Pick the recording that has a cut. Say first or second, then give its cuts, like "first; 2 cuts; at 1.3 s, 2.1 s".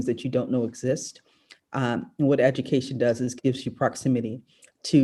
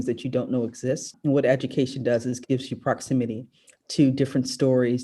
second; 1 cut; at 1.1 s